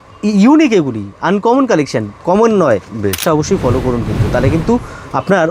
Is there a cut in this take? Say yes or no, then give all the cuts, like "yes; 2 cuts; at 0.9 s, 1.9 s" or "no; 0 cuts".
yes; 1 cut; at 3.2 s